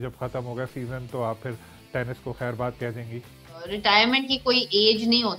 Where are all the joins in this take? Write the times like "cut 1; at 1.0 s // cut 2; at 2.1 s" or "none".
cut 1; at 3.8 s